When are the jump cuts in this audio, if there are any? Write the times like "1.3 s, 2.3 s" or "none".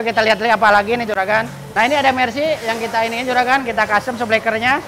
1.6 s